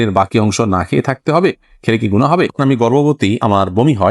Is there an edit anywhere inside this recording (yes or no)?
yes